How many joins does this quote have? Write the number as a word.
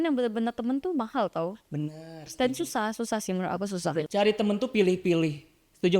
one